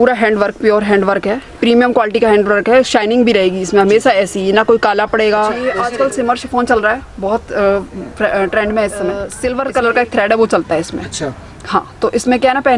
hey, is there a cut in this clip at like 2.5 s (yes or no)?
no